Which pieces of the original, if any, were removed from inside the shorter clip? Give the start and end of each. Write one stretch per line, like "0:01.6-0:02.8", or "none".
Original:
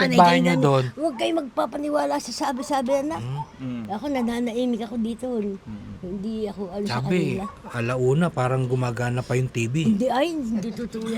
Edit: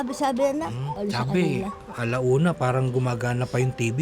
0:03.5-0:06.7

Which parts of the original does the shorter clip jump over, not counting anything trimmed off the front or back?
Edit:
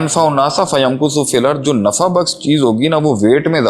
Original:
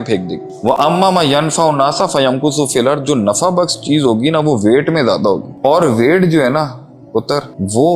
none

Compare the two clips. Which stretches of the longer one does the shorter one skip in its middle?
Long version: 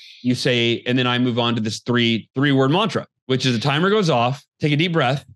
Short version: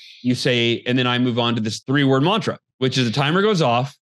0:01.8-0:02.3

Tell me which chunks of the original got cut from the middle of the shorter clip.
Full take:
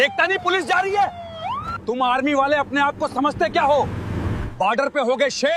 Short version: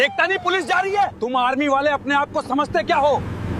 0:01.1-0:01.8

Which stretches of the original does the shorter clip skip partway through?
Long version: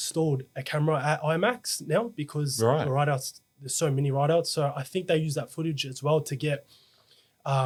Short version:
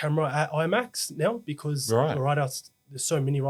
none

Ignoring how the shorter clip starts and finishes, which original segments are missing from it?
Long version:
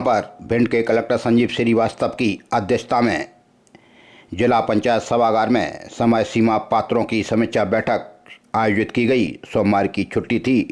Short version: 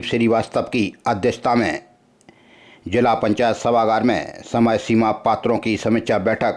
none

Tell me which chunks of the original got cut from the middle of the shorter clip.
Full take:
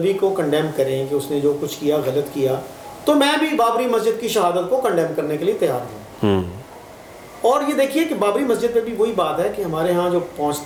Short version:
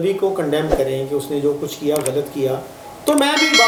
none

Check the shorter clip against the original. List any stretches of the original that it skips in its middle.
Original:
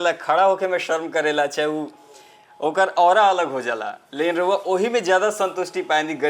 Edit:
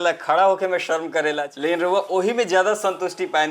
0:01.5-0:04.0

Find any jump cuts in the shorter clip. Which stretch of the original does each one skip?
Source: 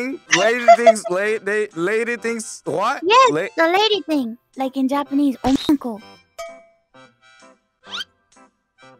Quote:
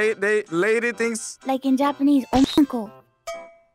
0:02.5-0:04.4

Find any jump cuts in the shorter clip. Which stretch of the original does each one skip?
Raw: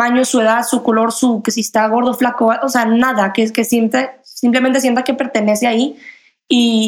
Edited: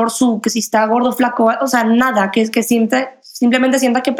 none

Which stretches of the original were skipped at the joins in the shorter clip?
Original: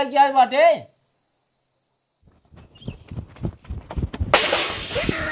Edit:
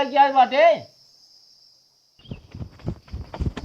0:02.2-0:02.7

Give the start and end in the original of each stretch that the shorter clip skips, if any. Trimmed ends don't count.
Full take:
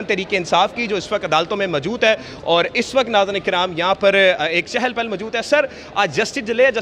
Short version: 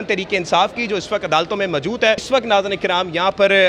0:02.2-0:02.9

